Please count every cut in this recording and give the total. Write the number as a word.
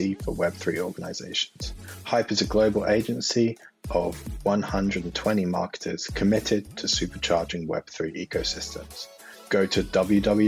zero